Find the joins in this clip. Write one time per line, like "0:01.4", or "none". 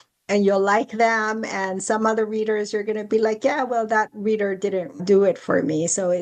0:05.0